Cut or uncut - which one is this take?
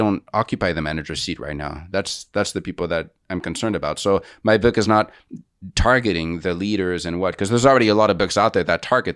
uncut